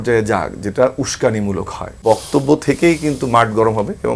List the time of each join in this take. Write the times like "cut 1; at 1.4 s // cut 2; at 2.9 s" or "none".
cut 1; at 2.0 s